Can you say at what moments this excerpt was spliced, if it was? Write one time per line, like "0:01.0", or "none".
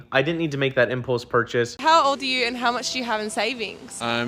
0:01.8